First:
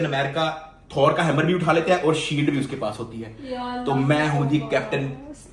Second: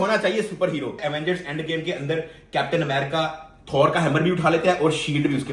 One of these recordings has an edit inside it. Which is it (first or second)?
second